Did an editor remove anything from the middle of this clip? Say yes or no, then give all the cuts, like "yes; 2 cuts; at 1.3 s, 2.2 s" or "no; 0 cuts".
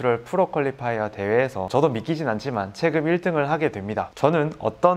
yes; 2 cuts; at 1.7 s, 4.1 s